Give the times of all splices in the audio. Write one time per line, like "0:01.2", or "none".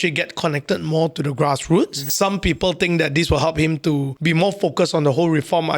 0:02.1
0:04.1